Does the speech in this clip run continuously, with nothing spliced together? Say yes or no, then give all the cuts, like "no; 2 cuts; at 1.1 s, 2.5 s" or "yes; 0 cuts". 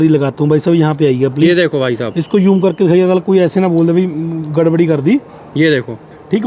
yes; 0 cuts